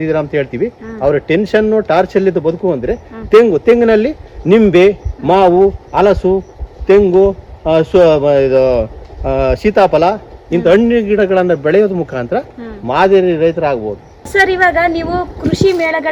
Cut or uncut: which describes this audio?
uncut